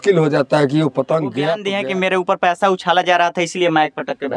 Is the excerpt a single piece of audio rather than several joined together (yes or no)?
no